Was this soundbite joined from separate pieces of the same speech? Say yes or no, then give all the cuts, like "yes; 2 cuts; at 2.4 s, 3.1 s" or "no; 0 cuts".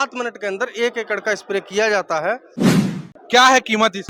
yes; 1 cut; at 2.9 s